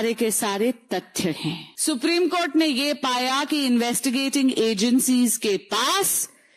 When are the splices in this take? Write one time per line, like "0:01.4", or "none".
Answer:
0:01.7